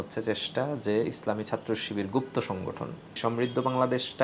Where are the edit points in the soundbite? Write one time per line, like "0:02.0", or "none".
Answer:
0:03.2